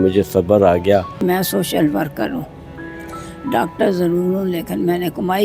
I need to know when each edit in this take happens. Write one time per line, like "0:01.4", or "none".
0:01.2